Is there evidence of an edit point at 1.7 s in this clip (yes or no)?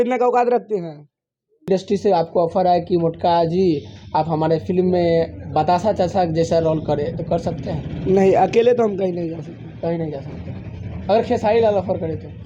yes